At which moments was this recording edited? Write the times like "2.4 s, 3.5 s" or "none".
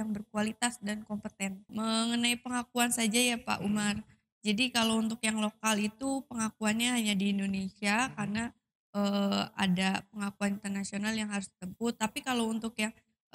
1.7 s